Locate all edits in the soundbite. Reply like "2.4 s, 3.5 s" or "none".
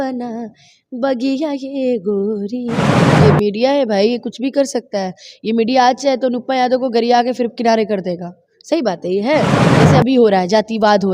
3.1 s, 9.7 s